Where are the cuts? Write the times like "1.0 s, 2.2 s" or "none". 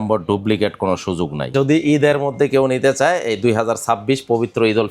1.5 s